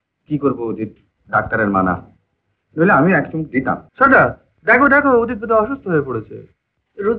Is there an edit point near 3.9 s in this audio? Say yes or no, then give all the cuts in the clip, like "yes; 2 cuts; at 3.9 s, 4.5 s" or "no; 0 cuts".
yes; 1 cut; at 3.9 s